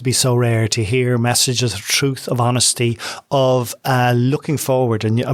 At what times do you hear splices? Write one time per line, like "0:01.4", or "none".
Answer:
none

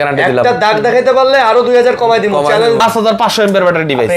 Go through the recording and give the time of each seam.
0:02.8

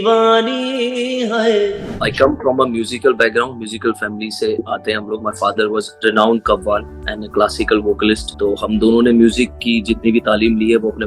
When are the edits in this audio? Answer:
0:02.1
0:04.6
0:05.9
0:08.3

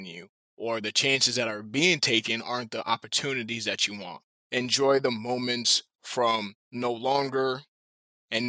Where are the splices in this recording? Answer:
0:04.4

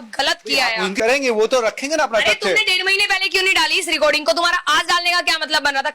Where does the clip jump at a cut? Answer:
0:00.9

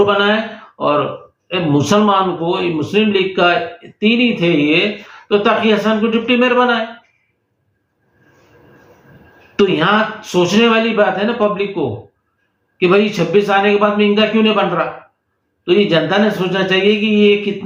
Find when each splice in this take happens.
none

